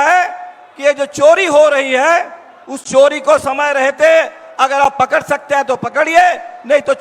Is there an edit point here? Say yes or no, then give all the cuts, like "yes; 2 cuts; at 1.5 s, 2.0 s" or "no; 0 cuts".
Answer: no; 0 cuts